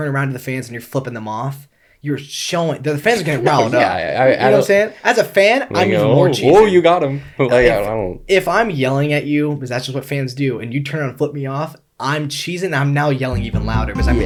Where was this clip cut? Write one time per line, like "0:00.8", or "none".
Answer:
none

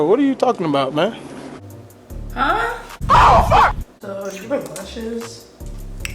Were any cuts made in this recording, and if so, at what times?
0:03.0
0:03.9

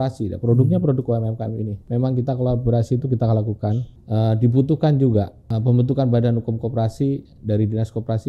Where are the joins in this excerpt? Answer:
0:01.7
0:03.9
0:05.4

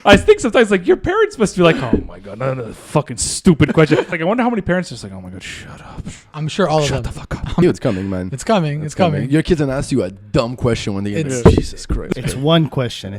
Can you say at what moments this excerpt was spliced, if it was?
0:04.1
0:07.6
0:11.9

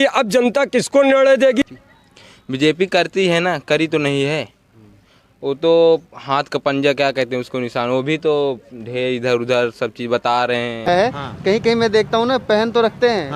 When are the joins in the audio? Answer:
0:01.6
0:10.8

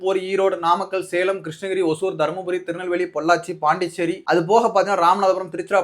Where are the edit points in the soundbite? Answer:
0:04.2

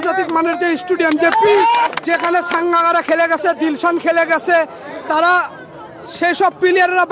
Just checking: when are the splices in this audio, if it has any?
0:01.9

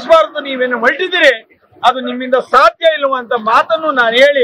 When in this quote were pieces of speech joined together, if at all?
none

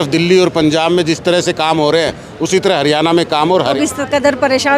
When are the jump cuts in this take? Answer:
0:03.8

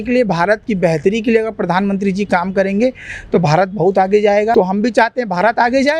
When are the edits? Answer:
0:04.5

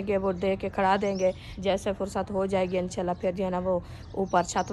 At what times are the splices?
0:01.5

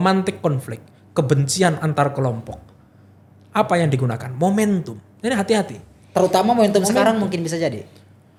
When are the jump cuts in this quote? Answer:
none

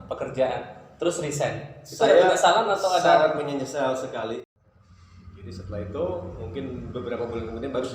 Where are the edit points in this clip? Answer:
0:04.5

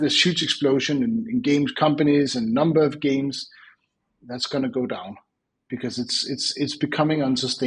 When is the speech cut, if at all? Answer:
none

